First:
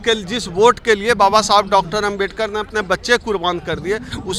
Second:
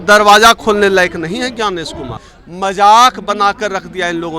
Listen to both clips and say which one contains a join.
second; 1 cut; at 2.2 s

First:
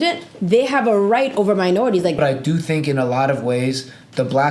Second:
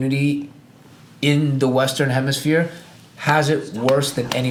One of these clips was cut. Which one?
first; 1 cut; at 2.2 s

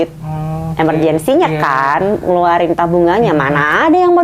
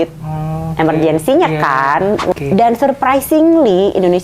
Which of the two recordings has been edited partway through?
second; 1 cut; at 2.3 s

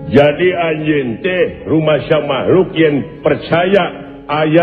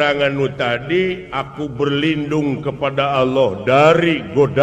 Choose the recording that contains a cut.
second; 1 cut; at 1.3 s

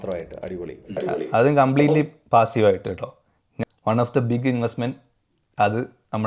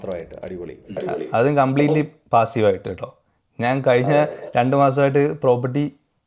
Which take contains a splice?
first; 1 cut; at 3.5 s

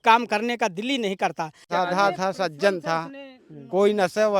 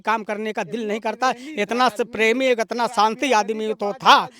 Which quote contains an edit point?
first; 1 cut; at 1.7 s

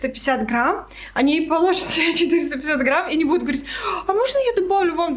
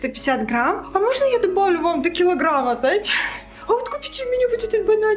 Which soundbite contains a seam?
second; 2 cuts; at 0.8 s, 3.6 s

